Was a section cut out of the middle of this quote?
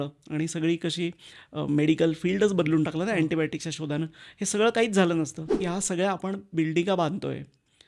yes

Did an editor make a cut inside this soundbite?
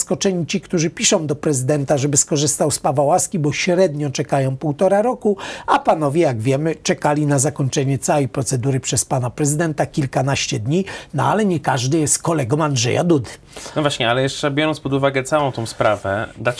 no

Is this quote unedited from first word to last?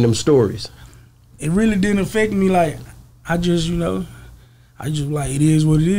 yes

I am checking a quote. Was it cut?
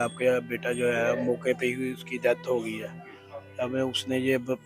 no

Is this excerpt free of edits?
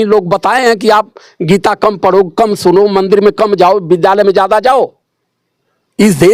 yes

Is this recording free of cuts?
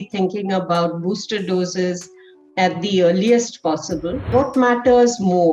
no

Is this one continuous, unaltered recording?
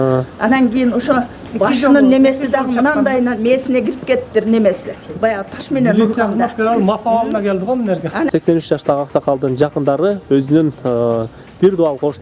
no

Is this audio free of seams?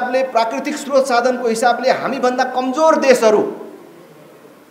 yes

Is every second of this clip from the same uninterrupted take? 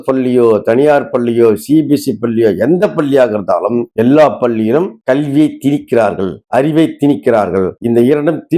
yes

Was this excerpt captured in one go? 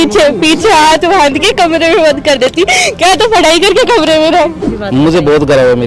no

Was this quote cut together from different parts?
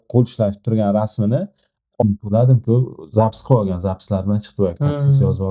yes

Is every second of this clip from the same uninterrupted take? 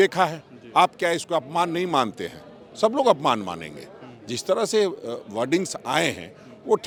yes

